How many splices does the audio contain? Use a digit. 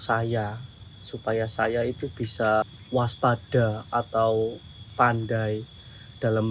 2